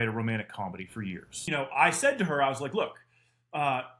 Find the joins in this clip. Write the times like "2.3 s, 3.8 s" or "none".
1.3 s